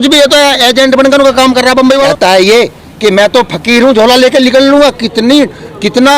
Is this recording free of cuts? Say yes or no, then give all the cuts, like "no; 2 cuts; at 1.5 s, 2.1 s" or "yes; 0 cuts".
no; 1 cut; at 2.1 s